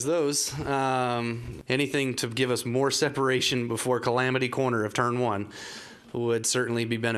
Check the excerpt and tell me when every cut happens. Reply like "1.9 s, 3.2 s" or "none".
1.5 s